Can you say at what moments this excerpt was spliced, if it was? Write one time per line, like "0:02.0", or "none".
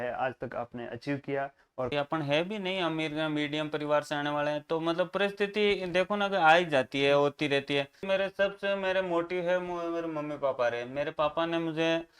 0:01.9
0:08.0